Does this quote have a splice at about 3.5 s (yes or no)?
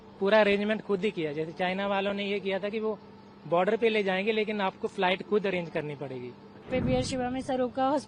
no